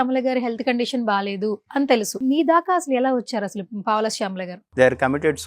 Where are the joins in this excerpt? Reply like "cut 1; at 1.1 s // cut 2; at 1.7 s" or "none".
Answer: cut 1; at 2.2 s // cut 2; at 4.6 s